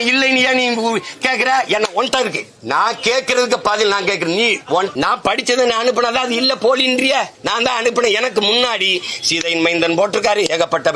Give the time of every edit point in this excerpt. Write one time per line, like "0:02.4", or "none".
0:02.5
0:04.9
0:07.4